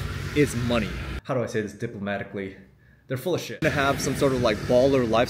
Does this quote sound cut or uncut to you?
cut